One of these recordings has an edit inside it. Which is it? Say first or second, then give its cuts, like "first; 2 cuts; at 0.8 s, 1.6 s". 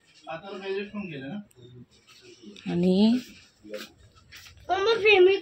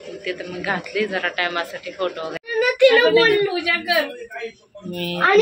second; 1 cut; at 2.4 s